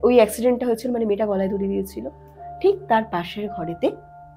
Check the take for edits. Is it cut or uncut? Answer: uncut